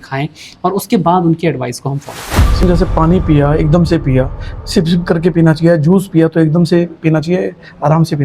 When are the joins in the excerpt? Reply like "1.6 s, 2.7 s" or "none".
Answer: 2.6 s